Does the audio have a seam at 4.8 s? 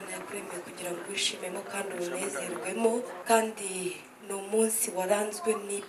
no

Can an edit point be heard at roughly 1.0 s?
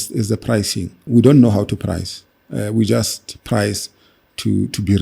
yes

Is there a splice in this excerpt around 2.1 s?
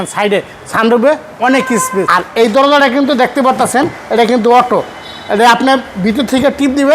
yes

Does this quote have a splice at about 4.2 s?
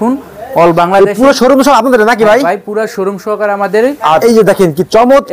yes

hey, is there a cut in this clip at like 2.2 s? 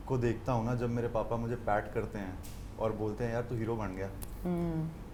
no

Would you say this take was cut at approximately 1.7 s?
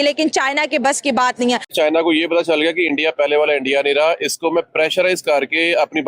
yes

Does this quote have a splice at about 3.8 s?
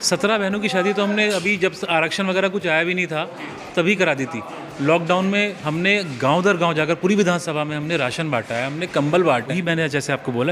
no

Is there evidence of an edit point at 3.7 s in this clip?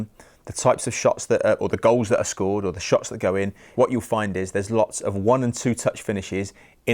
yes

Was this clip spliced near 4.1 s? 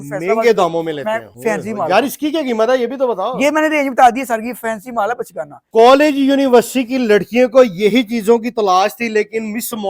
no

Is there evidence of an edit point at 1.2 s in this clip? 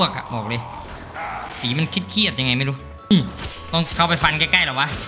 no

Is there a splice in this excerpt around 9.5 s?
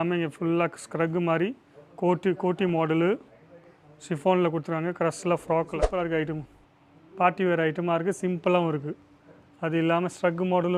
no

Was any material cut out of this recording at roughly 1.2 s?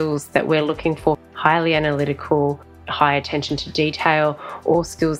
yes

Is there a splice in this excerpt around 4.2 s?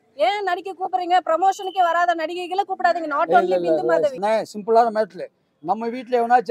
yes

